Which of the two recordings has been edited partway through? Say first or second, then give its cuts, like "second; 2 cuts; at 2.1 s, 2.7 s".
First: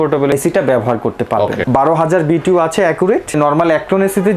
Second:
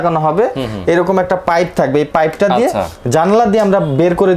first; 2 cuts; at 1.6 s, 3.3 s